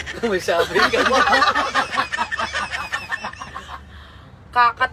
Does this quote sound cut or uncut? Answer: uncut